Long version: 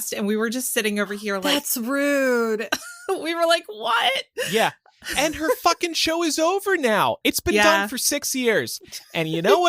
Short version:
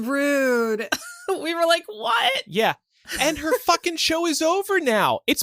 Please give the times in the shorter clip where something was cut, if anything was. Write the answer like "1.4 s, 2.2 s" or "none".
2.5 s

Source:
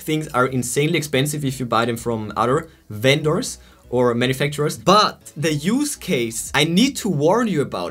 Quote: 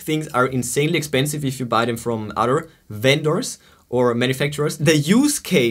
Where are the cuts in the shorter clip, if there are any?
4.7 s

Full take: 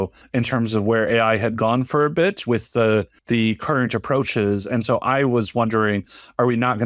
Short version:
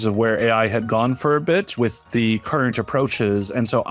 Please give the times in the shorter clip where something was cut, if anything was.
2.0 s

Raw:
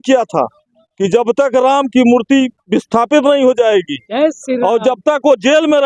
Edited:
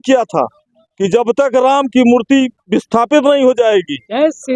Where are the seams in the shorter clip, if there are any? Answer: none

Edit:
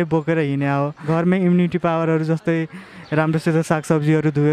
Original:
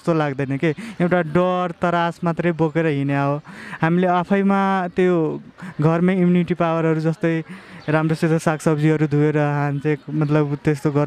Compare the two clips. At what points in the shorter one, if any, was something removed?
1.0 s

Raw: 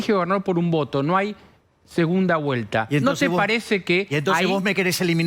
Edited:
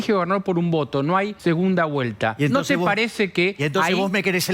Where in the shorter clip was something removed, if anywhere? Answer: 1.3 s

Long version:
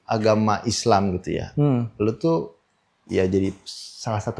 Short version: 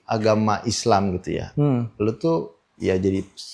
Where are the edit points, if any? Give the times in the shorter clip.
2.6 s

